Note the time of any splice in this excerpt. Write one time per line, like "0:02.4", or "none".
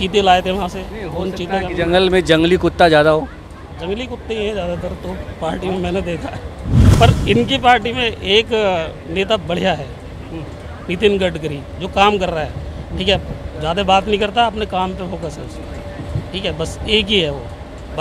0:06.9